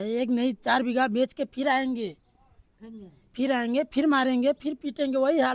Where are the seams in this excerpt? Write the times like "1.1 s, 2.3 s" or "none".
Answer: none